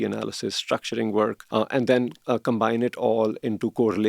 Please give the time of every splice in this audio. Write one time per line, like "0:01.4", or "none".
0:01.4
0:02.2